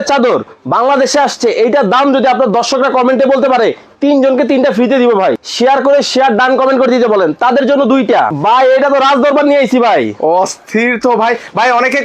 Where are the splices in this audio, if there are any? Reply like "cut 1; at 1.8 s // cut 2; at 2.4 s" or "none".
cut 1; at 5.4 s // cut 2; at 8.4 s